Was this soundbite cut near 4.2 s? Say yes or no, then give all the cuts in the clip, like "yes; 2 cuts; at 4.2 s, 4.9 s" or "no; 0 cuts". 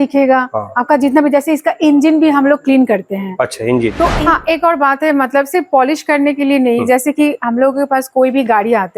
yes; 1 cut; at 4.2 s